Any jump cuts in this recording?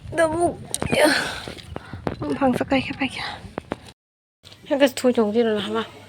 yes; 1 cut; at 4.0 s

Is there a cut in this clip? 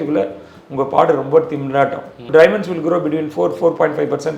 yes; 1 cut; at 2.2 s

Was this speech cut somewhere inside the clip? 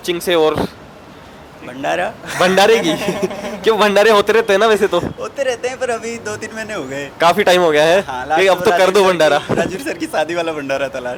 no; 0 cuts

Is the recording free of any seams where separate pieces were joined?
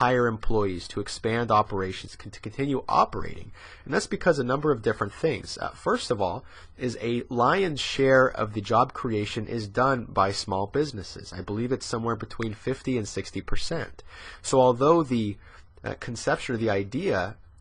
yes; 0 cuts

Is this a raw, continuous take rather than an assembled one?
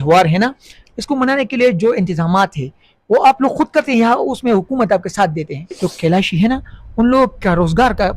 no; 1 cut; at 5.7 s

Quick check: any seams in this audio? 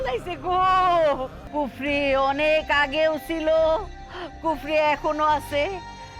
yes; 1 cut; at 1.4 s

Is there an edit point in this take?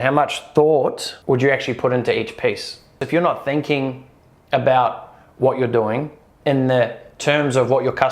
yes; 2 cuts; at 1.1 s, 3.0 s

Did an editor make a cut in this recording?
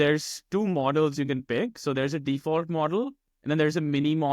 no; 0 cuts

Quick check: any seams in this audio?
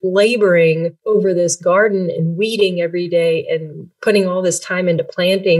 yes; 1 cut; at 1.0 s

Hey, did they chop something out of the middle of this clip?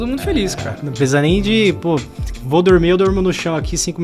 no; 0 cuts

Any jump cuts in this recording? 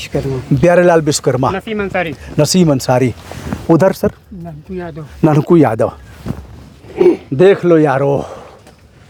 no; 0 cuts

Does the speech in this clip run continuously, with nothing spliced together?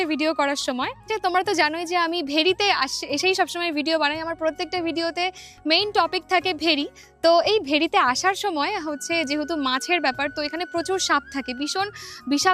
no; 1 cut; at 1.0 s

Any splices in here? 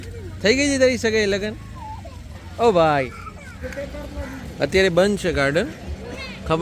yes; 1 cut; at 3.6 s

